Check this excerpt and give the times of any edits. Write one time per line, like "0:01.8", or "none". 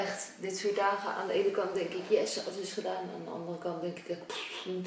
none